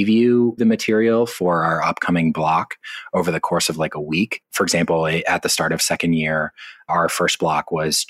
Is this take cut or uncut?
cut